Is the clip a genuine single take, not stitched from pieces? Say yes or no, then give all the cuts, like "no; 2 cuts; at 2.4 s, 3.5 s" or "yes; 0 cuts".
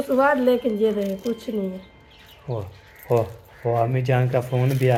yes; 0 cuts